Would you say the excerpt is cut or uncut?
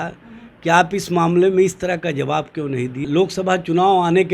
cut